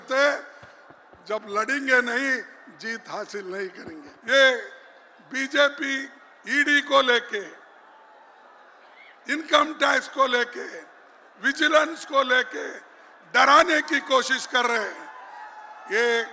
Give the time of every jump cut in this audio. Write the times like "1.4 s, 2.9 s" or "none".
4.1 s